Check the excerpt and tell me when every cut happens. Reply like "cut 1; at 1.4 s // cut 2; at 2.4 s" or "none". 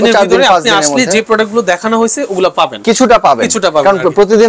none